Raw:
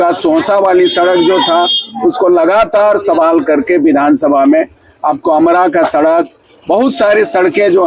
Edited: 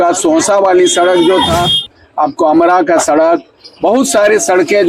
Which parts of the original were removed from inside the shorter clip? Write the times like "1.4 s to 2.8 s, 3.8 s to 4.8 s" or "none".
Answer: 1.9 s to 4.8 s

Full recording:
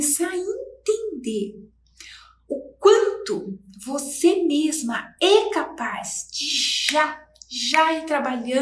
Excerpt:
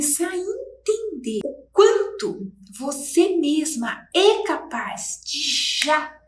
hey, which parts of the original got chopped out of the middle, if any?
1.4 s to 2.5 s

